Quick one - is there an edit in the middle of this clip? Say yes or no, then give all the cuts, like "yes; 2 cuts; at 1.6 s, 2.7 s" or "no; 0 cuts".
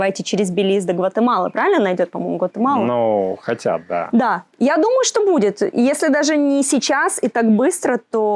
no; 0 cuts